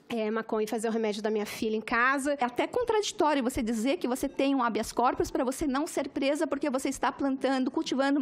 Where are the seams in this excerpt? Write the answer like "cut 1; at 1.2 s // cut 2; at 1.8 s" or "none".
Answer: cut 1; at 2.4 s